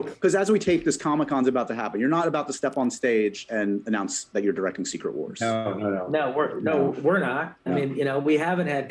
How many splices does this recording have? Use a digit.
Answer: 1